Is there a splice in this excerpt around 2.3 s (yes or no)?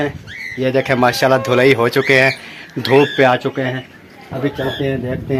no